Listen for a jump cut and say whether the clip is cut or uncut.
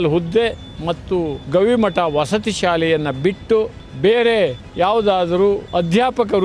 cut